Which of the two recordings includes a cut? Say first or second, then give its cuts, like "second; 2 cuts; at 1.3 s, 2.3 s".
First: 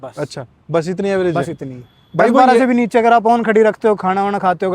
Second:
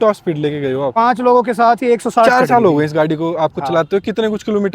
second; 2 cuts; at 0.9 s, 2.3 s